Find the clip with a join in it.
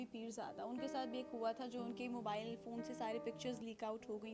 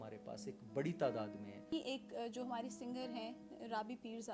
second; 1 cut; at 1.7 s

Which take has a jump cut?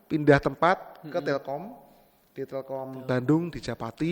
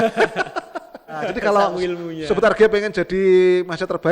second; 1 cut; at 1.3 s

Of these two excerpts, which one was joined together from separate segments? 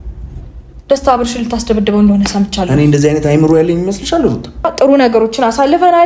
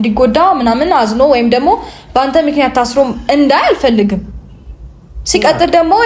first; 1 cut; at 4.7 s

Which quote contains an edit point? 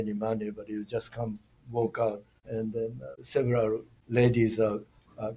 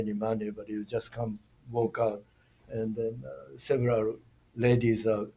first; 2 cuts; at 2.8 s, 3.9 s

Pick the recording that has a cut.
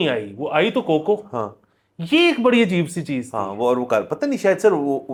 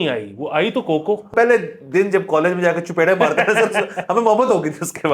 second; 1 cut; at 1.3 s

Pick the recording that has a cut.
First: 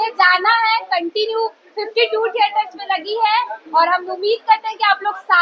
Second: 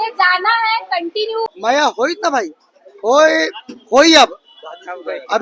second; 1 cut; at 1.6 s

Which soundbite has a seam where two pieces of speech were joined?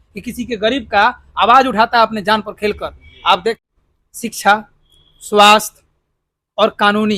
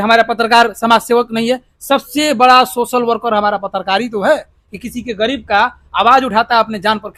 first; 1 cut; at 3.6 s

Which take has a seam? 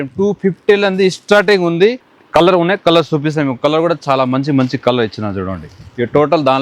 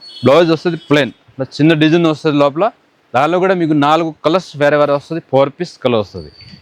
first; 1 cut; at 2.1 s

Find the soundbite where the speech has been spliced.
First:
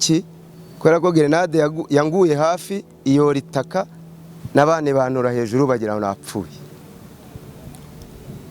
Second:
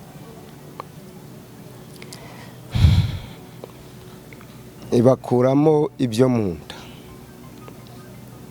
second; 1 cut; at 4.8 s

